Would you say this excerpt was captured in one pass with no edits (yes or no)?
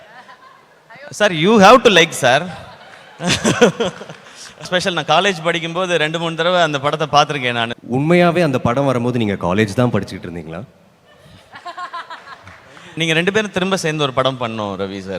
no